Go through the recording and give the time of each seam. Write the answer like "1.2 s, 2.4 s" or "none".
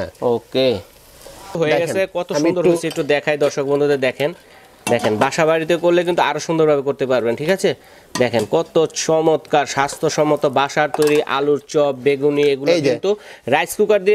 1.6 s